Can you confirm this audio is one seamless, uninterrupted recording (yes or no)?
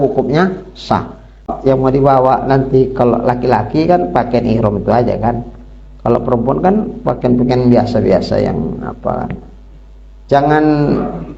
no